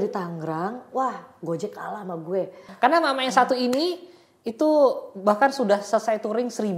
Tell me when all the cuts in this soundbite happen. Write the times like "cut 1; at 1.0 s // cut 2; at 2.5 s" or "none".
cut 1; at 2.6 s